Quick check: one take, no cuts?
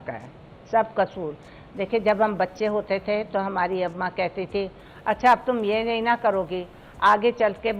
yes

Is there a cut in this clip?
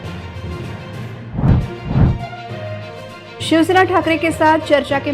yes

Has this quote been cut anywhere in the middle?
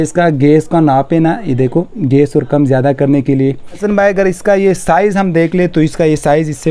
yes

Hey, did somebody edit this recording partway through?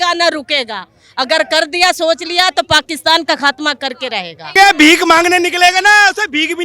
yes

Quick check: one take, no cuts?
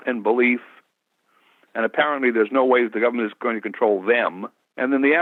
yes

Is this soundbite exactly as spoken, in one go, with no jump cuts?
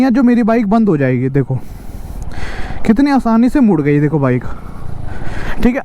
yes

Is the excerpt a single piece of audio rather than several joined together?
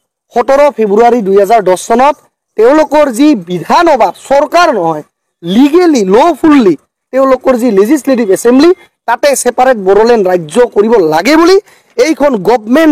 yes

